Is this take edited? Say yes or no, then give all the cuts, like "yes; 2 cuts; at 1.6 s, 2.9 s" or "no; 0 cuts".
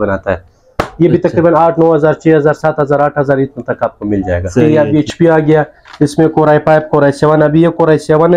yes; 1 cut; at 4.7 s